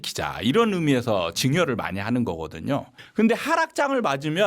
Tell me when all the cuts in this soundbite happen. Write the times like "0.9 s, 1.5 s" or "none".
3.0 s